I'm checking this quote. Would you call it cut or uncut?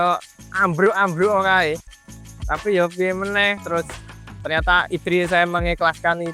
uncut